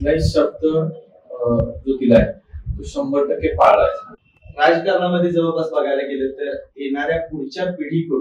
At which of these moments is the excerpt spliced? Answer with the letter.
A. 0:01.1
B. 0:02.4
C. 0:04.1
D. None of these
D